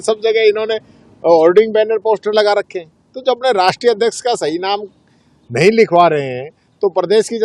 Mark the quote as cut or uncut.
uncut